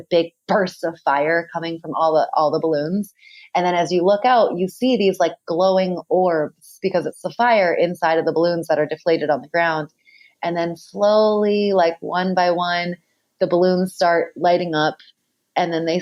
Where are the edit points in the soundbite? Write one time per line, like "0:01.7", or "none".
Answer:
none